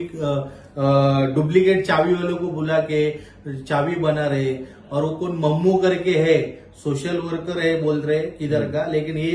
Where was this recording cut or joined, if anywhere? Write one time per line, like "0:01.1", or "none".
none